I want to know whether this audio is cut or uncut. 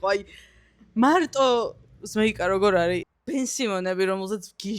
cut